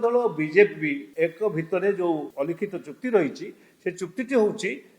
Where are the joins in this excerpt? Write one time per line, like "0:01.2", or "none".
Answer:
0:01.0
0:02.3